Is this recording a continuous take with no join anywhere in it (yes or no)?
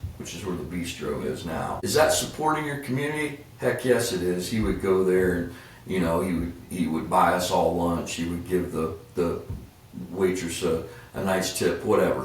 no